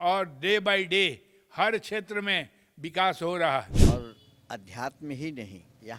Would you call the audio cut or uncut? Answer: cut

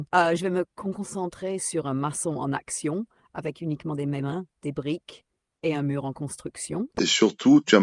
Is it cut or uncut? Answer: cut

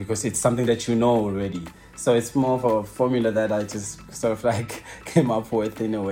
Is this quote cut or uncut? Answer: uncut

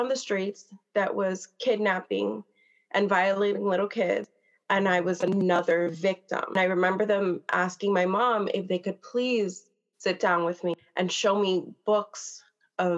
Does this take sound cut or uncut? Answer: uncut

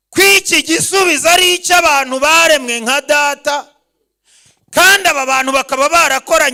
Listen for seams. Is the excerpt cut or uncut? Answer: uncut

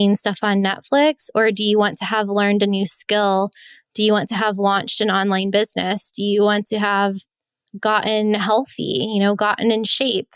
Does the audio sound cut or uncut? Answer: uncut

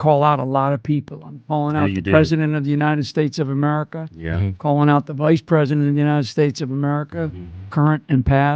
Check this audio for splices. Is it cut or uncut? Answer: uncut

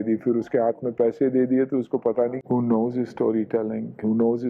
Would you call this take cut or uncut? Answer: cut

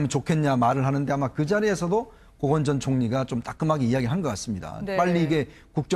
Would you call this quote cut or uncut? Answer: cut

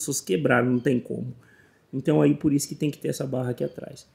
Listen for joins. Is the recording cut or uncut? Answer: uncut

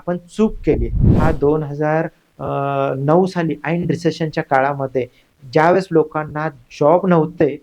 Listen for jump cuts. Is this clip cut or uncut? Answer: cut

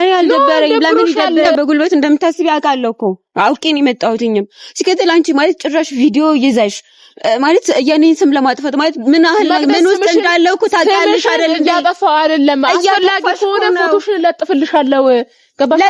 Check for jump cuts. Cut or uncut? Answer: cut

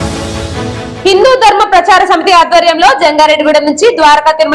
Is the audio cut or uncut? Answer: cut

